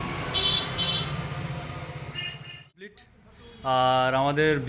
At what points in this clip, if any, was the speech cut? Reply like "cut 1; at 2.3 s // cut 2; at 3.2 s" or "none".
cut 1; at 3.1 s